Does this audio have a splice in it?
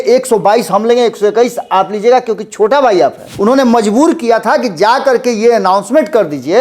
yes; 1 cut; at 3.3 s

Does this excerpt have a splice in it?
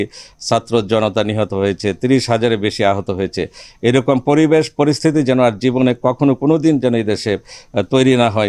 no; 0 cuts

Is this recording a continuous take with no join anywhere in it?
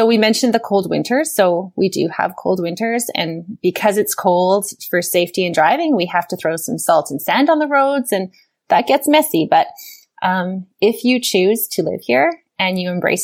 yes; 0 cuts

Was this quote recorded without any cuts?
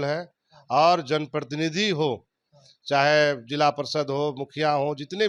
yes; 0 cuts

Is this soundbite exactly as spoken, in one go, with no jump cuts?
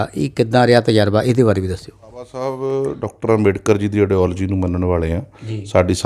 no; 1 cut; at 2.4 s

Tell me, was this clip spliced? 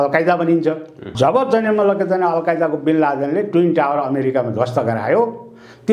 yes; 1 cut; at 1.1 s

